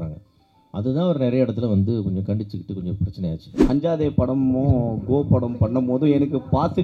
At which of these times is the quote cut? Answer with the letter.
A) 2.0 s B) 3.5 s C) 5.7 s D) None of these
B